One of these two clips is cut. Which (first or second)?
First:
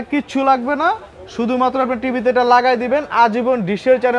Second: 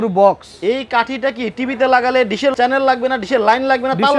second